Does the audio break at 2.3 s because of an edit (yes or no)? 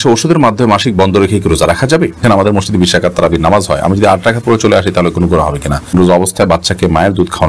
yes